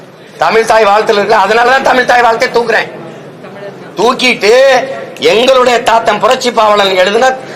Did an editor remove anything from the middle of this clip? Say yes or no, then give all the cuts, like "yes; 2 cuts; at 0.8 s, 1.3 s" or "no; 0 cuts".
no; 0 cuts